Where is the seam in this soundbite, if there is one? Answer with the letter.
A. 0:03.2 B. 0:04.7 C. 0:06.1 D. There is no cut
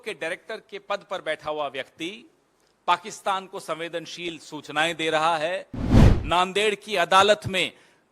C